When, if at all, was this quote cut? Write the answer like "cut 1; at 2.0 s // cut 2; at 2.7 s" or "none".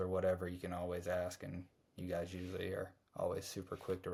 none